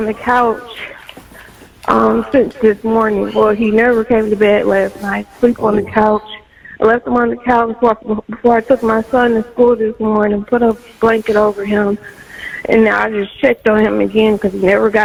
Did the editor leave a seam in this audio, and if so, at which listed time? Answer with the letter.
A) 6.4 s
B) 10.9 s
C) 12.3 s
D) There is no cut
D